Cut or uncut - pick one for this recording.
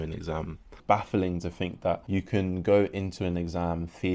cut